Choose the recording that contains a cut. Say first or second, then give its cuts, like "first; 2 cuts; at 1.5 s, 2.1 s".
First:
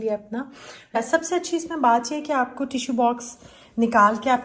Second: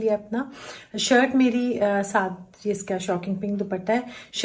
first; 1 cut; at 1.0 s